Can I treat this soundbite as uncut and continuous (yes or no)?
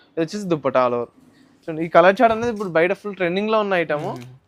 yes